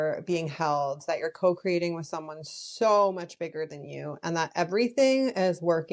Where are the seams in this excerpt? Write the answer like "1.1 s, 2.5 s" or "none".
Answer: none